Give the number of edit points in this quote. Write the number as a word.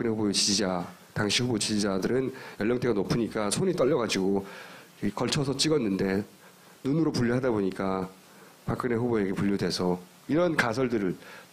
one